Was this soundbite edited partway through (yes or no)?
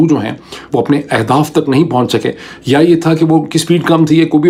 no